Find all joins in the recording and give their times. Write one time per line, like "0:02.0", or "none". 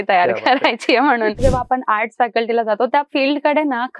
0:01.4

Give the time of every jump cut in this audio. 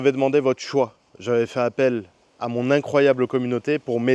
none

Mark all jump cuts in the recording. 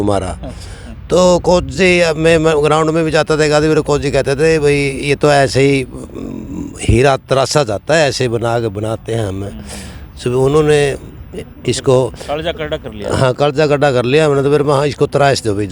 none

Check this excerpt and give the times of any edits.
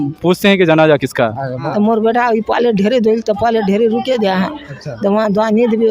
0:01.5

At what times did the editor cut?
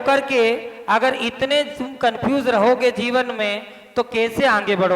none

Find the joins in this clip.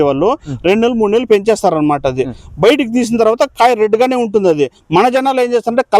none

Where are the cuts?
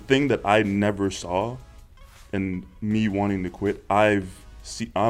none

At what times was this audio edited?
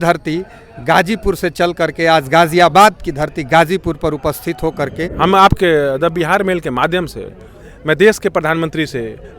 0:05.0

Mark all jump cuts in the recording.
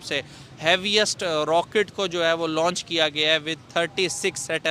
none

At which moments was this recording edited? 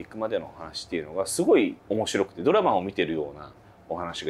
0:01.8

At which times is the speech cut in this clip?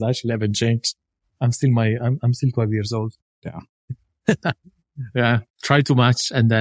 0:03.6

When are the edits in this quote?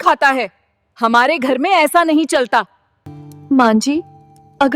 0:02.6

